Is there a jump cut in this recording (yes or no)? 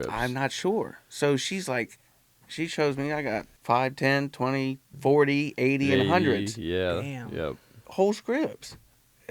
yes